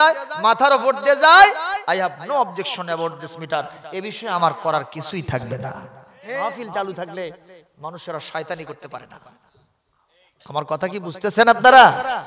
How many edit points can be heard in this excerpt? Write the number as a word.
one